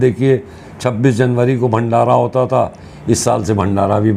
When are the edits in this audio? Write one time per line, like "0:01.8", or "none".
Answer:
none